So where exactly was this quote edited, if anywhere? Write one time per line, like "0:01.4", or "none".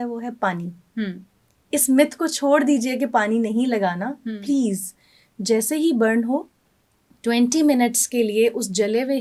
none